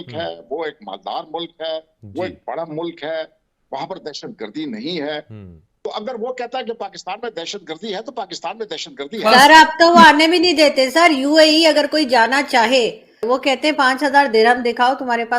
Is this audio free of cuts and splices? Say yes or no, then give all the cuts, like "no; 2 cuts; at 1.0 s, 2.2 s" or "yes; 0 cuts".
no; 1 cut; at 9.2 s